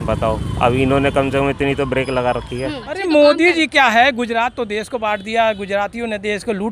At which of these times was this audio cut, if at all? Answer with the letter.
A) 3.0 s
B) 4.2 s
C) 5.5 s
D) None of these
A